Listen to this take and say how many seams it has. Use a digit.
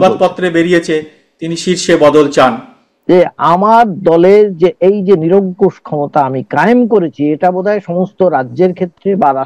1